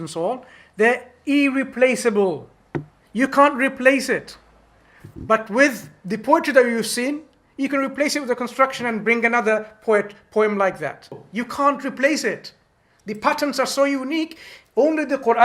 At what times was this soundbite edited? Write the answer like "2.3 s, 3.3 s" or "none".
11.2 s